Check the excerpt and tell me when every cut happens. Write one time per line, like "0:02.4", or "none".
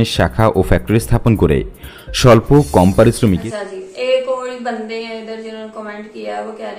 0:03.4